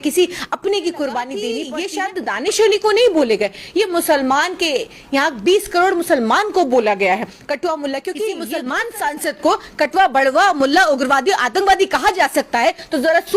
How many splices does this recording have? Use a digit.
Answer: 2